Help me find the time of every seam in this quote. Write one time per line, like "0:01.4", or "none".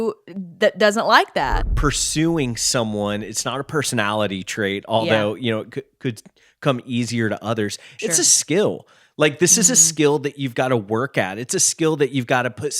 0:01.4